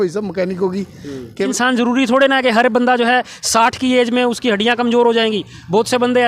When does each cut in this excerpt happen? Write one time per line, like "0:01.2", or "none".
0:01.5